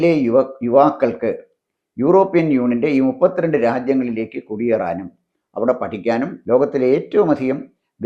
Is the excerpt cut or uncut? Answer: cut